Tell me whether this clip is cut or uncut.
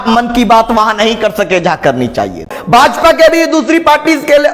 cut